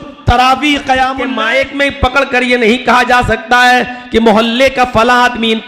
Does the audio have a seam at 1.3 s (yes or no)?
yes